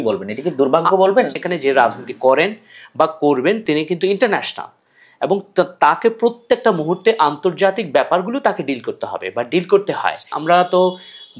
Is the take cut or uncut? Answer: cut